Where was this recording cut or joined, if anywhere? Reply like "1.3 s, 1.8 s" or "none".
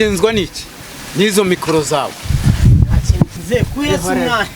3.4 s